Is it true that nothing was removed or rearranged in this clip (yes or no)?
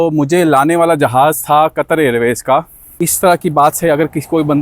no